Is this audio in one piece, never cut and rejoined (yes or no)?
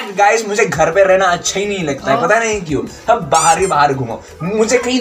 yes